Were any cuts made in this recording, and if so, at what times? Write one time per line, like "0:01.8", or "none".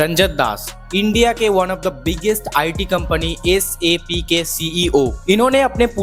none